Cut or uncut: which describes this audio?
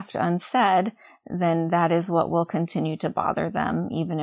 uncut